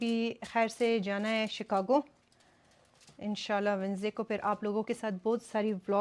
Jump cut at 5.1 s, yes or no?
no